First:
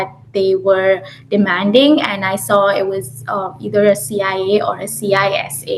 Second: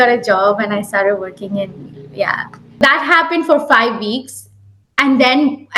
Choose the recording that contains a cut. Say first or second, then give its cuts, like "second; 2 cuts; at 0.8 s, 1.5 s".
second; 1 cut; at 2.8 s